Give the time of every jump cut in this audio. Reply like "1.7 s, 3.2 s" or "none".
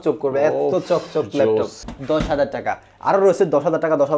1.9 s